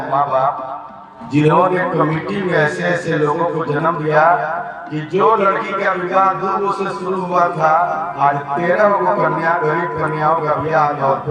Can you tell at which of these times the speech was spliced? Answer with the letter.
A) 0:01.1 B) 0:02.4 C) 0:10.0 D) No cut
D